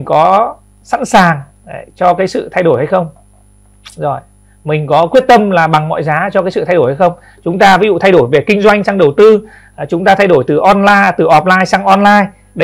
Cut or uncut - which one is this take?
uncut